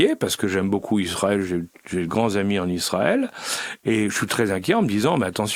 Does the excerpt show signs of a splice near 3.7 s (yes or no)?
no